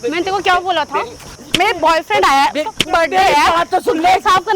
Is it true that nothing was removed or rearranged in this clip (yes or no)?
no